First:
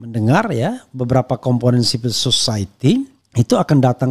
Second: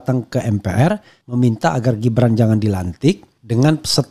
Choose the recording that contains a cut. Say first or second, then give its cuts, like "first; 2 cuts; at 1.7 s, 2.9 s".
second; 1 cut; at 1.2 s